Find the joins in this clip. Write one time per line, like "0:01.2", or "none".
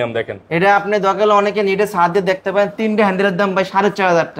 none